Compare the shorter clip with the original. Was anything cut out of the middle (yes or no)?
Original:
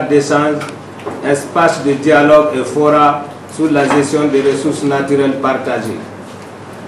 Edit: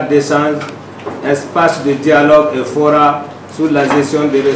no